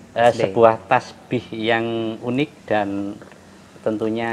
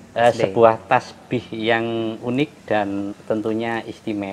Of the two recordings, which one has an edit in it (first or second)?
second